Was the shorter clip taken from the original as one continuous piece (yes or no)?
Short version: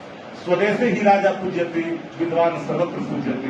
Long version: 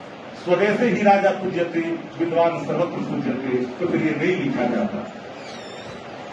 yes